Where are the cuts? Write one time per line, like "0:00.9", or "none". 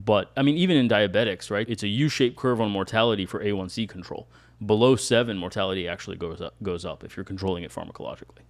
0:01.7